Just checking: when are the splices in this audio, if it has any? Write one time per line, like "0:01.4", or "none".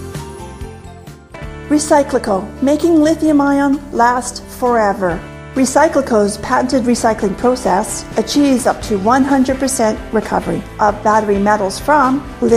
0:00.9